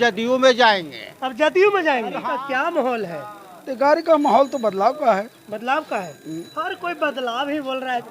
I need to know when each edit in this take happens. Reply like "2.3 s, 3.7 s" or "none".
2.1 s